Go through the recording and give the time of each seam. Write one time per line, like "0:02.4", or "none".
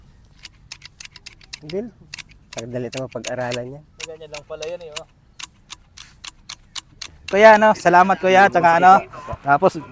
0:07.2